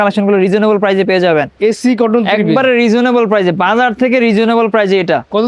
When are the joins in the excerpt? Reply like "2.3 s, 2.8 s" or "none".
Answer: 1.5 s